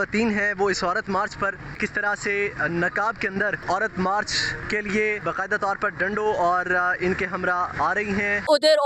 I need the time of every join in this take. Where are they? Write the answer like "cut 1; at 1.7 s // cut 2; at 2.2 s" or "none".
cut 1; at 1.8 s // cut 2; at 3.6 s // cut 3; at 4.5 s // cut 4; at 5.2 s // cut 5; at 8.1 s